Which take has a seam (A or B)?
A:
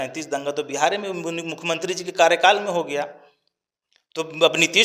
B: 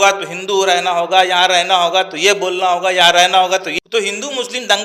B